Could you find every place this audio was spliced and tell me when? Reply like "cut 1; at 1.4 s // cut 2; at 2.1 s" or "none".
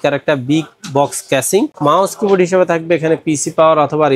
cut 1; at 1.7 s